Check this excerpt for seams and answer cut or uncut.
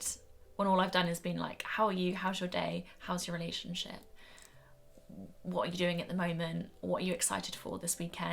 uncut